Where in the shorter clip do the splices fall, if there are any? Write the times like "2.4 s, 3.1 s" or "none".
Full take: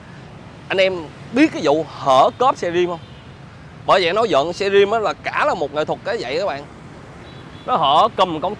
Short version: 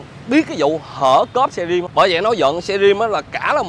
1.9 s